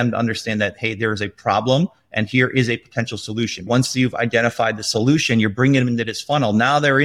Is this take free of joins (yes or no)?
no